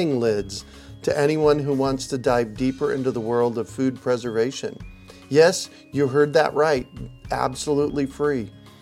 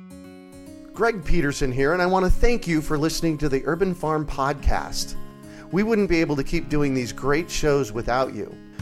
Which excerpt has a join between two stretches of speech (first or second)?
second